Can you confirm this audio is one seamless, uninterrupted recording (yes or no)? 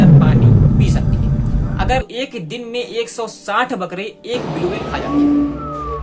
no